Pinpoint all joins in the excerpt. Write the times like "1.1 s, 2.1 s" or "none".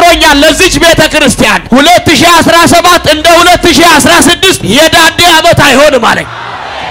1.6 s, 4.6 s